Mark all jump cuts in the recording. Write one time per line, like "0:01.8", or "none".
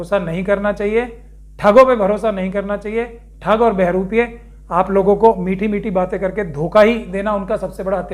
none